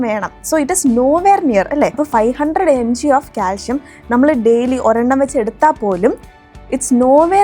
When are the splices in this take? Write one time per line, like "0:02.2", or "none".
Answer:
0:02.0